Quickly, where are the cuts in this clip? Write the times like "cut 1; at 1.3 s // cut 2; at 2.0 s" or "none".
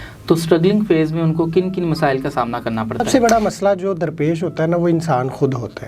cut 1; at 3.1 s